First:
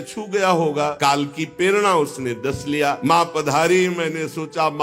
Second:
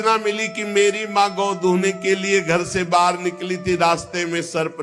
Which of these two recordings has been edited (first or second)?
first